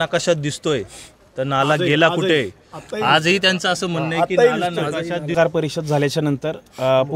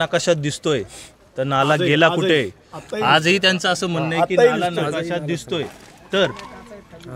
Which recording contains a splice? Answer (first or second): first